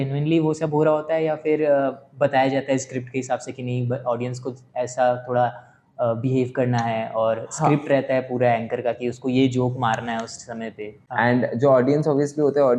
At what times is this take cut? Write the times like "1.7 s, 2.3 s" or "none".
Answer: 10.9 s